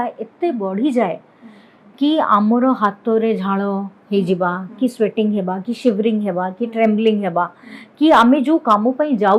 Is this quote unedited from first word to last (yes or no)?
yes